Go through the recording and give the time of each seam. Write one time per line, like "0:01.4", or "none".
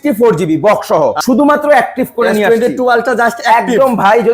0:01.2